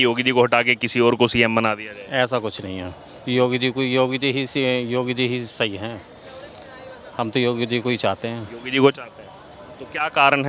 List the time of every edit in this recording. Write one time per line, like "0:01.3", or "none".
none